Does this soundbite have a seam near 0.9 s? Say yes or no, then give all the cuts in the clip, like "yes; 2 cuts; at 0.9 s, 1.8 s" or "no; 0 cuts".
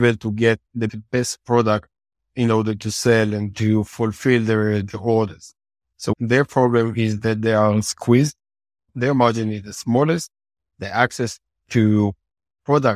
yes; 3 cuts; at 0.9 s, 6.1 s, 8.9 s